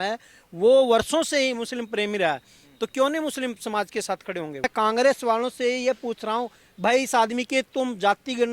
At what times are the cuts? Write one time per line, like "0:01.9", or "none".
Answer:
0:04.6